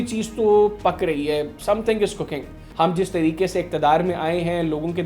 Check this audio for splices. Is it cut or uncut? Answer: cut